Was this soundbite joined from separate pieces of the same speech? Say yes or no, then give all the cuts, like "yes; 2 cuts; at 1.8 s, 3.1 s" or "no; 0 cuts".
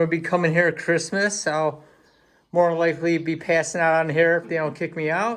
no; 0 cuts